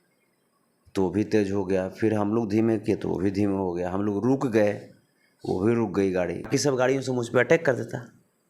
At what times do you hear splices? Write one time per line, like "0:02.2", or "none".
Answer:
0:06.5